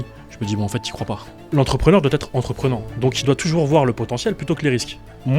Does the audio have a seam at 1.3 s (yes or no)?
yes